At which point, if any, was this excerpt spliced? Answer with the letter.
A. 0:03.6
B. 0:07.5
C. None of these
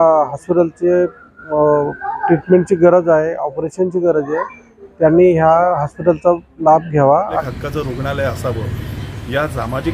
B